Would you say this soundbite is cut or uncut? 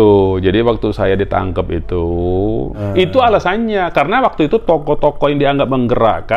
cut